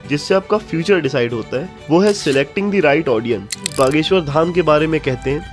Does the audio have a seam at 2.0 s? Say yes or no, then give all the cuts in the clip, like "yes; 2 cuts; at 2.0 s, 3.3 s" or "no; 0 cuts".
no; 1 cut; at 3.7 s